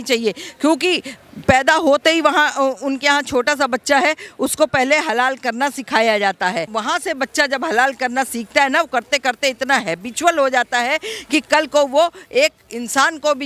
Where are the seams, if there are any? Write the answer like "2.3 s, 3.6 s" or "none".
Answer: 6.7 s